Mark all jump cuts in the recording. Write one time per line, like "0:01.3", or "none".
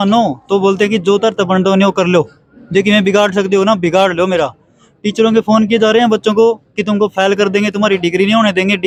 none

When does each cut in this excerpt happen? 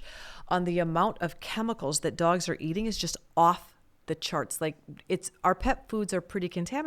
none

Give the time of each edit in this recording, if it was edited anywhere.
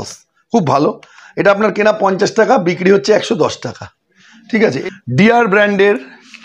0:04.8

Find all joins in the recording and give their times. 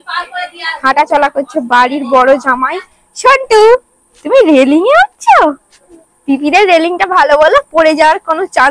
none

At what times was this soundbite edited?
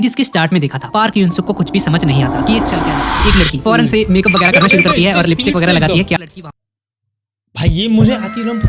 0:03.2
0:06.2

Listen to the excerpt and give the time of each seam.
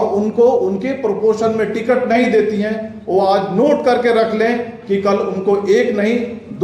none

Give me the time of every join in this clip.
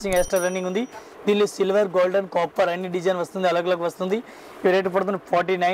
none

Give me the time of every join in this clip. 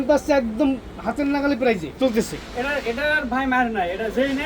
0:01.9

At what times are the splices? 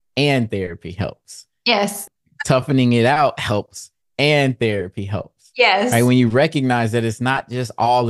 0:02.0

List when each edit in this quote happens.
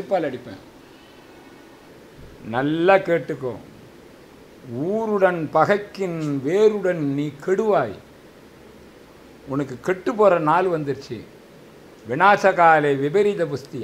0:01.9

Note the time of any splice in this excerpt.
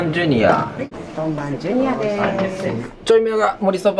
0:01.0
0:02.9

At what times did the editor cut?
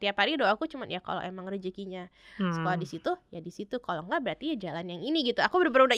none

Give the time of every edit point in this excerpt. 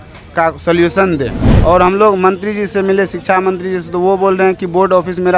0:01.4

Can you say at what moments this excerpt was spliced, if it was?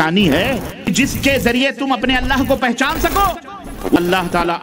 0:00.9
0:04.0

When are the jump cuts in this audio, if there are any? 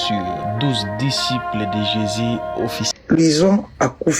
0:02.9

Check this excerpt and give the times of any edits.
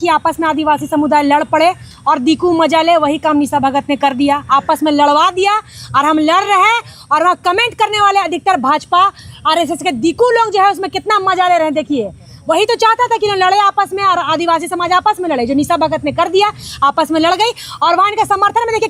none

